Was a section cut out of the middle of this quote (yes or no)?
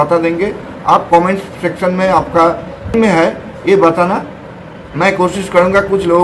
no